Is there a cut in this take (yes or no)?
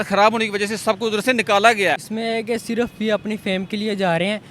yes